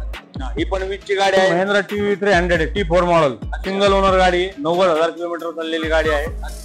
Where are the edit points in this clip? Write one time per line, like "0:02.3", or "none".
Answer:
0:01.5